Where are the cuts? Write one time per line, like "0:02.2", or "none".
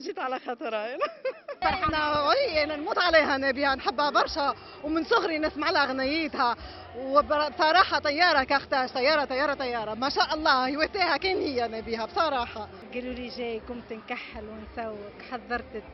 0:01.6
0:12.8